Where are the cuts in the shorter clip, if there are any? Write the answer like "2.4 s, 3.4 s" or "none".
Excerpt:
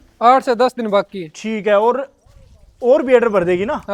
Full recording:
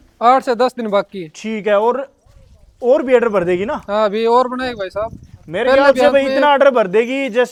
none

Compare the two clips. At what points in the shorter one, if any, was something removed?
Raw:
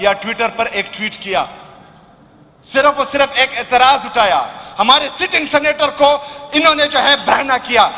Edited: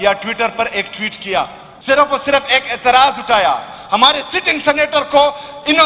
1.7 s

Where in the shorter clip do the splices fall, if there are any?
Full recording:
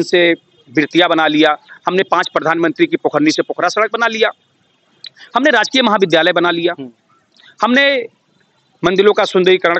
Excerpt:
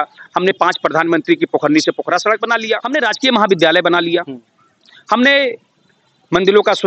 2.8 s

